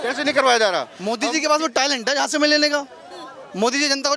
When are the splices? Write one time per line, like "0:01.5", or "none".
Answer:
0:01.0